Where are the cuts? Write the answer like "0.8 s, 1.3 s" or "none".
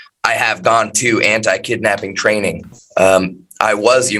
none